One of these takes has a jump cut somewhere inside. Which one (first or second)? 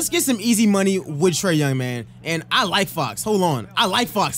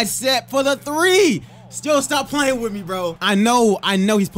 second